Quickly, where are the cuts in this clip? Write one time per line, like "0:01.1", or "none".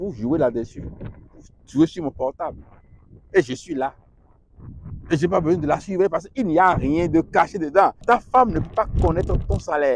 0:08.0